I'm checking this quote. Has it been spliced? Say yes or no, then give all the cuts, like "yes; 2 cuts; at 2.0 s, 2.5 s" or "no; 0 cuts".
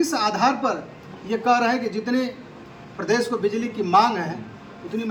no; 0 cuts